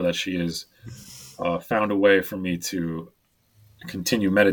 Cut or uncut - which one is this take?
cut